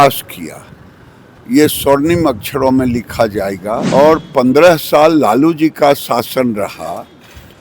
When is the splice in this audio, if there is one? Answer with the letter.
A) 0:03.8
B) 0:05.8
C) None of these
A